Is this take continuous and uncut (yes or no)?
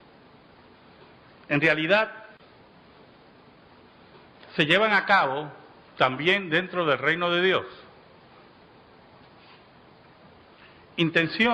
yes